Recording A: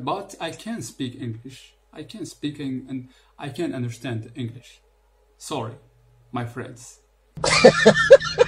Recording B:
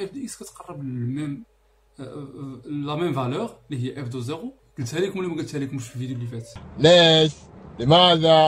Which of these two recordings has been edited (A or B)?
B